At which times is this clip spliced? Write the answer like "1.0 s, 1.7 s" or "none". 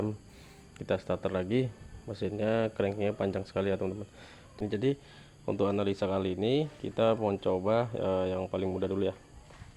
4.6 s